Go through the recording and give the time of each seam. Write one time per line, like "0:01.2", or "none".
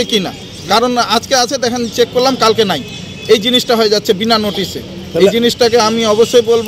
none